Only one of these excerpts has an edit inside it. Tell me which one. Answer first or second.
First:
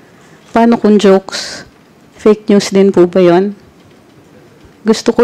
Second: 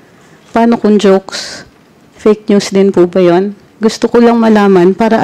second